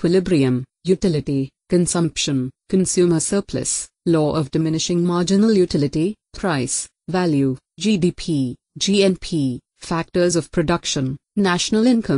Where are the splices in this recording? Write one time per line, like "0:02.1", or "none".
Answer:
none